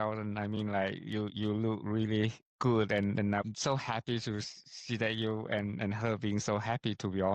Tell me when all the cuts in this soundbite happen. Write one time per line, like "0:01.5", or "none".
none